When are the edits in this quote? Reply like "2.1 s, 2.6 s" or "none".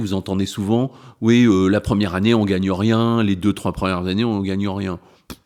none